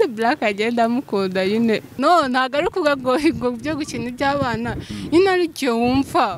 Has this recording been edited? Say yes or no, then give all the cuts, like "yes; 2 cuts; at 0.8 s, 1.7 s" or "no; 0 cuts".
yes; 1 cut; at 1.9 s